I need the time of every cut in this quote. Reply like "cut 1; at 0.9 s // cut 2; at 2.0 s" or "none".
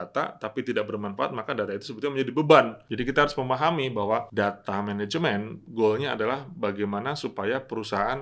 cut 1; at 2.8 s // cut 2; at 4.3 s